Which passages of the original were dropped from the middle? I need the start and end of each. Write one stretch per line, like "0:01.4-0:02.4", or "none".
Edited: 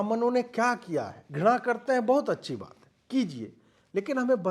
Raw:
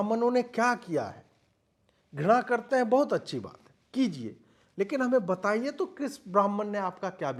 0:01.2-0:02.0